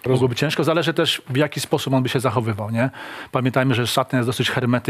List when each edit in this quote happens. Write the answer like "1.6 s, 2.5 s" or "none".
none